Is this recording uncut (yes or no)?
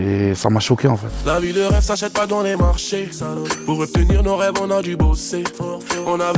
no